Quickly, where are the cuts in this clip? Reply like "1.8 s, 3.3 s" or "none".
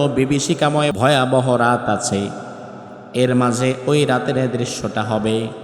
0.9 s